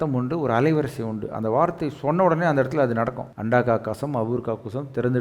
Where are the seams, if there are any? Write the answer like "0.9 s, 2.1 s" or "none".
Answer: 3.3 s